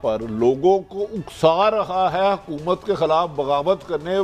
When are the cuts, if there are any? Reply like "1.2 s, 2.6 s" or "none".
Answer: none